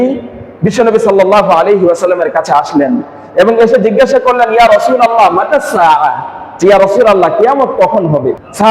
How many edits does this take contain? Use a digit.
0